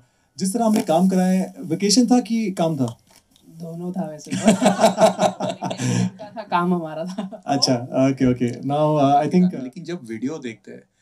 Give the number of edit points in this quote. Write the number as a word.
one